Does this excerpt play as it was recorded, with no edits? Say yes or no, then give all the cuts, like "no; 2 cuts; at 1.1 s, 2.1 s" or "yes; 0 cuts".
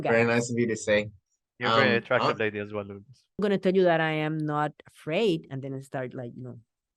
no; 1 cut; at 3.4 s